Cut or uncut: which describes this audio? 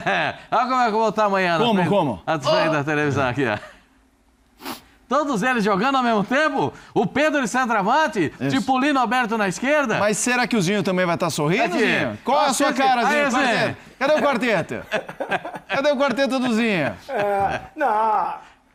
uncut